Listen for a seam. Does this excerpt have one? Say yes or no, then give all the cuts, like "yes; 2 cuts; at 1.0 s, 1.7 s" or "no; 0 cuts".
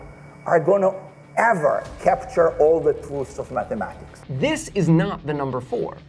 yes; 1 cut; at 4.1 s